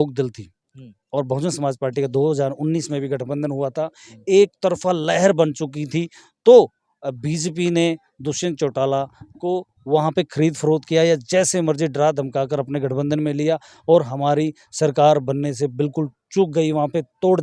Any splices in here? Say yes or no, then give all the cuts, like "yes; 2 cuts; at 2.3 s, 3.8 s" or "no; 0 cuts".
no; 0 cuts